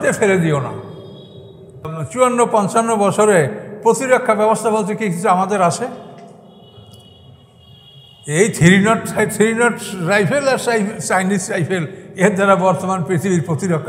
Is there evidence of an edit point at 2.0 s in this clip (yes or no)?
yes